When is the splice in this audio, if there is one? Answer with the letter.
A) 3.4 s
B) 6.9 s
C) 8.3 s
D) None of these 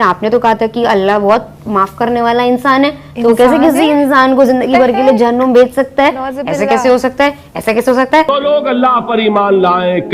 C